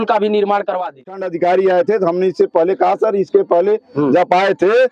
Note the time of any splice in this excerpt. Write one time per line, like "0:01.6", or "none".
0:01.1